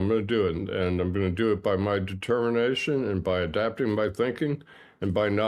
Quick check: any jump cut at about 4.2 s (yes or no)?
no